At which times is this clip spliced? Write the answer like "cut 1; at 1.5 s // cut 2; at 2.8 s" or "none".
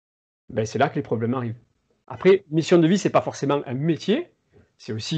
cut 1; at 2.0 s